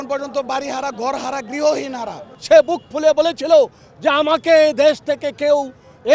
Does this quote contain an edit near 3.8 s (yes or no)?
no